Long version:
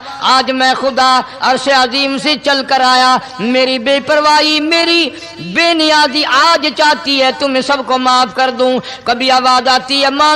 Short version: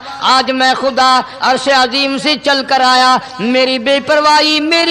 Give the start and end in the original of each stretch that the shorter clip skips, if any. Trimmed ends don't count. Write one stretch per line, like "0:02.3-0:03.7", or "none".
none